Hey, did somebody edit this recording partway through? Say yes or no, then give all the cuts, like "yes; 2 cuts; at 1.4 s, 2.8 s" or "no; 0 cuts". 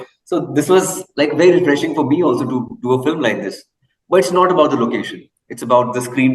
no; 0 cuts